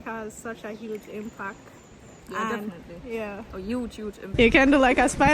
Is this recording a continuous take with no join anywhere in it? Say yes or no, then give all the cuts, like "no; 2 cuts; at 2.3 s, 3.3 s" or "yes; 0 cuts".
no; 1 cut; at 4.3 s